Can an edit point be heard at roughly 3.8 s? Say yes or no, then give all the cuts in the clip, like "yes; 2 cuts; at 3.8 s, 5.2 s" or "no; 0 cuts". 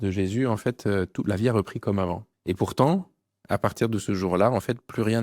no; 1 cut; at 2.3 s